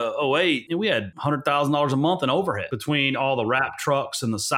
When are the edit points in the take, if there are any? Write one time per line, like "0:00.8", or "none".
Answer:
0:00.8
0:02.7

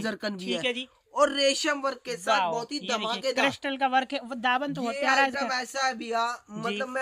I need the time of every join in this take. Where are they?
none

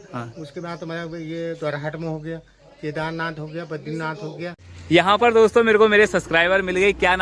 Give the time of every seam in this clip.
0:04.7

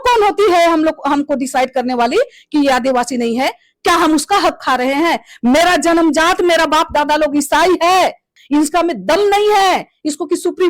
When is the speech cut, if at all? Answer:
0:08.3

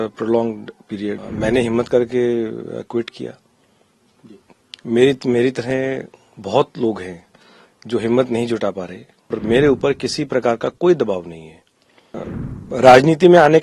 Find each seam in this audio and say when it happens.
0:01.2
0:09.4
0:12.2

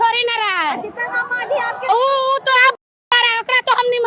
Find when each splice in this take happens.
none

